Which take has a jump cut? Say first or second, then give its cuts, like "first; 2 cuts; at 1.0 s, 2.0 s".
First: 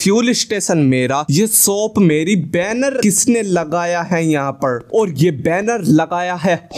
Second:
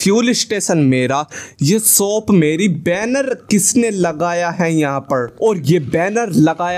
first; 2 cuts; at 1.3 s, 3.0 s